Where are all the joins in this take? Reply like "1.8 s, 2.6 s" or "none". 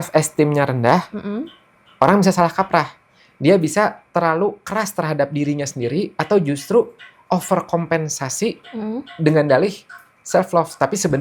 none